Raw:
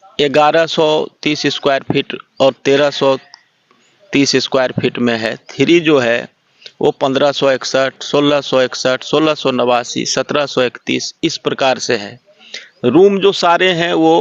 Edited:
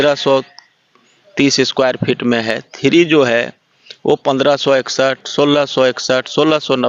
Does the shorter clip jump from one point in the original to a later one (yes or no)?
no